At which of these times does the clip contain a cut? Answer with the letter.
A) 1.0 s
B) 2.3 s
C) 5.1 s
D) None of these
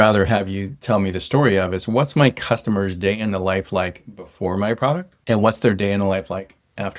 C